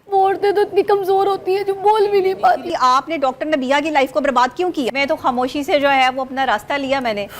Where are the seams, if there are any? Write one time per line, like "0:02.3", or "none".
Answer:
0:02.7
0:04.9

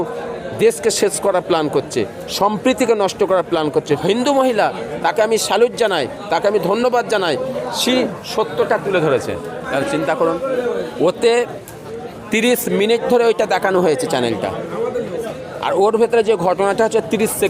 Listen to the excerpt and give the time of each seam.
0:03.9
0:04.9
0:09.7

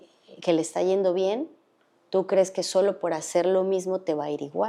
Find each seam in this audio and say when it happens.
none

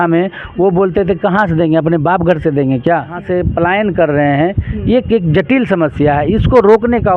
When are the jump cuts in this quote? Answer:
0:03.2

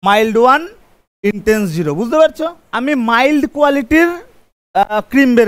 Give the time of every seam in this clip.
0:02.6

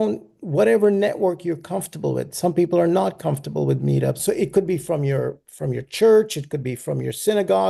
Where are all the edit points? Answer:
0:04.2

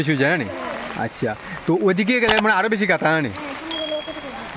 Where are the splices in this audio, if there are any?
none

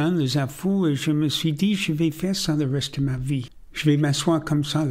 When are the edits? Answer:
0:03.6

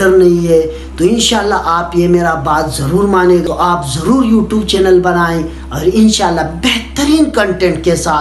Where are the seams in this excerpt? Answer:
0:03.5

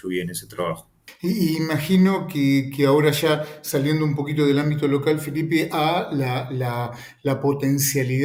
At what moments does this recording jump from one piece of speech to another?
none

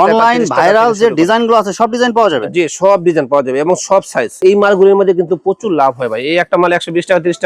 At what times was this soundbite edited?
0:04.4

